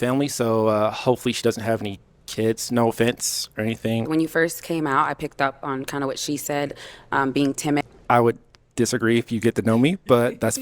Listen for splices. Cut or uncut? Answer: cut